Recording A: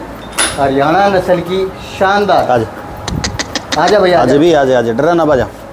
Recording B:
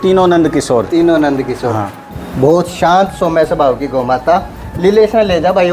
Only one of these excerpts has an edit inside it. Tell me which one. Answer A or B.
B